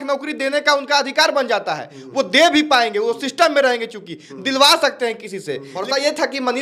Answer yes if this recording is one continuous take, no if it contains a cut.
no